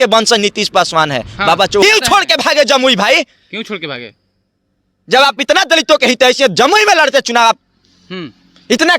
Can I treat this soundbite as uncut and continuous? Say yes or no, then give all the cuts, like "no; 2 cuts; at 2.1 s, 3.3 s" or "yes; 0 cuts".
no; 1 cut; at 1.8 s